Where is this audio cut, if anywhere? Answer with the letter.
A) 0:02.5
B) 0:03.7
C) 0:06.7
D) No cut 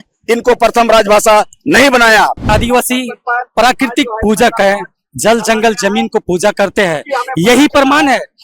A